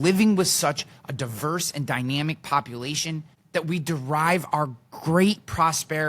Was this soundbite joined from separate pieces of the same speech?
yes; 1 cut; at 3.3 s

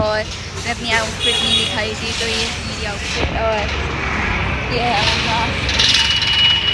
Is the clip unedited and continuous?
yes; 0 cuts

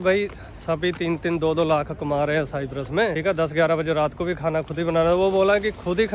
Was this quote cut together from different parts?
yes; 1 cut; at 3.2 s

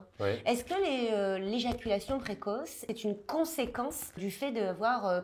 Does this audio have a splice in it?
no; 0 cuts

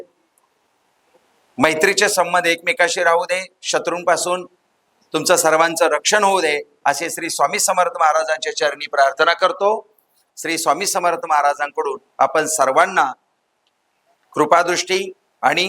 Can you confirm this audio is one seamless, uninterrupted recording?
no; 1 cut; at 10.2 s

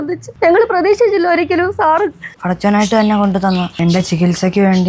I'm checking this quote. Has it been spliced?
yes; 2 cuts; at 2.3 s, 3.7 s

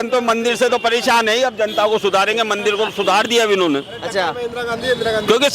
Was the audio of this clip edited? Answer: no; 0 cuts

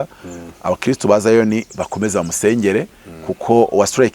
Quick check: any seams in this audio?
no; 0 cuts

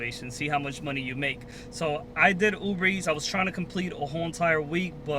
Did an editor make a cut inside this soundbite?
no; 0 cuts

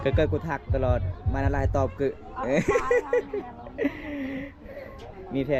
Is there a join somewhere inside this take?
no; 0 cuts

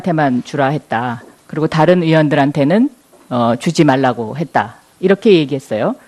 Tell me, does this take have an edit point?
no; 0 cuts

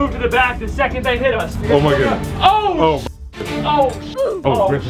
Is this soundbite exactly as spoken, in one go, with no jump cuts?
yes; 0 cuts

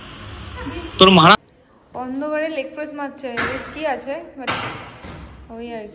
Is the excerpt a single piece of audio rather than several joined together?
no; 1 cut; at 1.4 s

